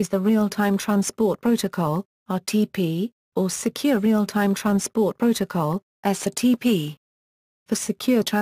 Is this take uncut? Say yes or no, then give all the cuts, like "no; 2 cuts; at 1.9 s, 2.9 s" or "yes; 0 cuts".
no; 1 cut; at 7.3 s